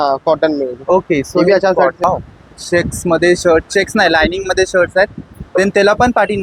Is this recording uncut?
no; 1 cut; at 2.0 s

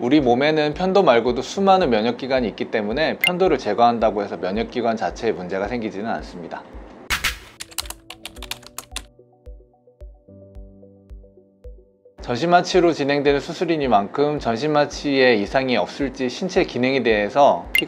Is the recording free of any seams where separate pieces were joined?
yes; 0 cuts

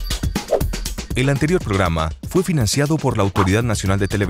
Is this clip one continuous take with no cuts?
yes; 0 cuts

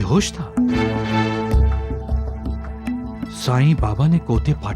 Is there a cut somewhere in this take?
no; 0 cuts

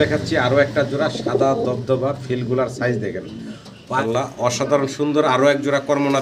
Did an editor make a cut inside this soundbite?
yes; 1 cut; at 4.0 s

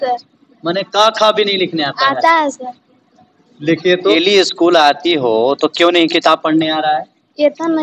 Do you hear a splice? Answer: yes; 1 cut; at 4.2 s

